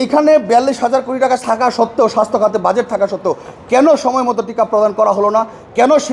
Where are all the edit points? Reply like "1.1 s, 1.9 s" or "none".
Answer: none